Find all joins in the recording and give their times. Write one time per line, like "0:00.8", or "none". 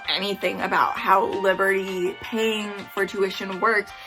none